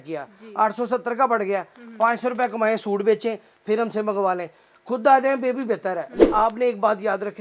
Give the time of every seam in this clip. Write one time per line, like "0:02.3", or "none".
0:06.3